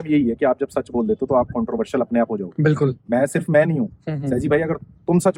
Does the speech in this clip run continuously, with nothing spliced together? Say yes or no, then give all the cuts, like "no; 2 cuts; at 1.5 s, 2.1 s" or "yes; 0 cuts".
yes; 0 cuts